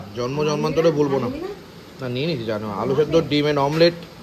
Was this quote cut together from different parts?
no; 0 cuts

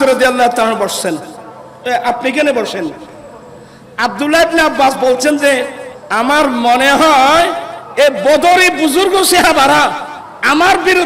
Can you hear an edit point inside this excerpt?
no; 0 cuts

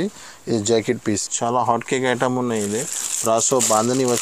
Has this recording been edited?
yes; 1 cut; at 1.0 s

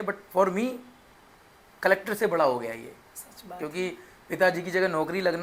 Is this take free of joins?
yes; 0 cuts

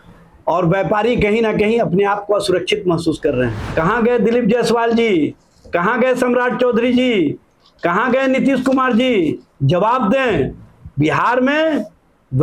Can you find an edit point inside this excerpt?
yes; 1 cut; at 3.6 s

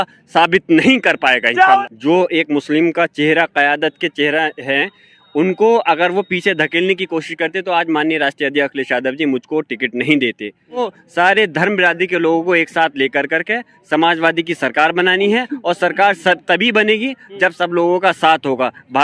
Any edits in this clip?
yes; 2 cuts; at 1.8 s, 10.8 s

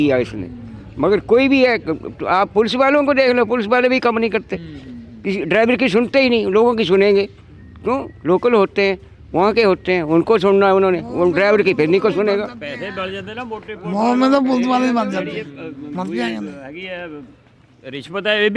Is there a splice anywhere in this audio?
no; 0 cuts

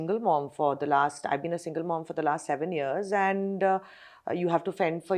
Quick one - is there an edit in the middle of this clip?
no; 0 cuts

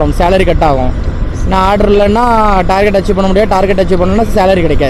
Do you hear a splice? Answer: no; 0 cuts

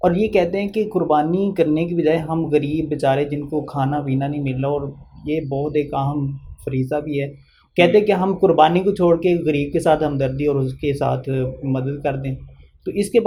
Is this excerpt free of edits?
yes; 0 cuts

